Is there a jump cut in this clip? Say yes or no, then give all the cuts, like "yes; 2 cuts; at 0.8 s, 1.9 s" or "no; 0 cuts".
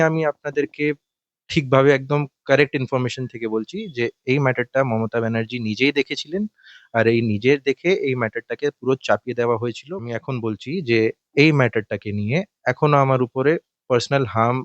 yes; 1 cut; at 9.9 s